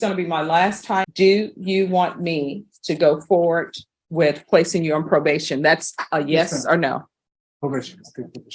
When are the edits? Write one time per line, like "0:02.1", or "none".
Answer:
0:01.1